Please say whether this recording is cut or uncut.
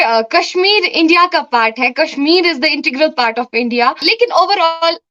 cut